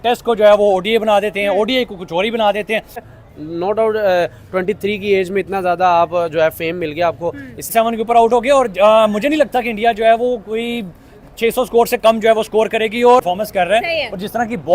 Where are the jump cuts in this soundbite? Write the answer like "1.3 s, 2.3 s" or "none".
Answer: 3.0 s, 7.6 s, 13.2 s